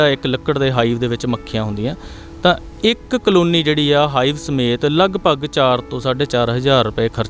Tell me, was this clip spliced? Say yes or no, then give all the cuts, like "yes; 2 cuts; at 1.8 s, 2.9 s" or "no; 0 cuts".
no; 0 cuts